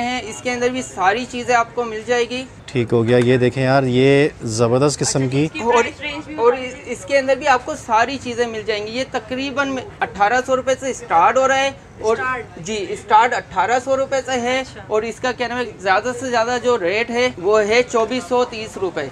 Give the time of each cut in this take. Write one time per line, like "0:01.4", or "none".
none